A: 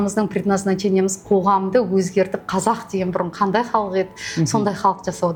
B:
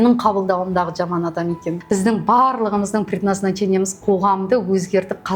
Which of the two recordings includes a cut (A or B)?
B